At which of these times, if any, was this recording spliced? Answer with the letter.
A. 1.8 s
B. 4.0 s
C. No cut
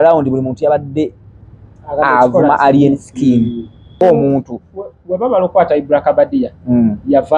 B